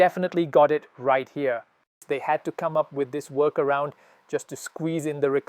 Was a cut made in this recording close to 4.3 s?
no; 1 cut; at 2.0 s

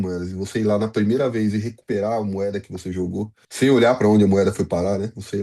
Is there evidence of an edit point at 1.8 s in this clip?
no; 1 cut; at 3.4 s

